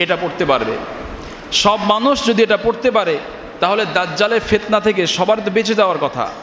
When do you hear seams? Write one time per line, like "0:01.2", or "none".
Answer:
none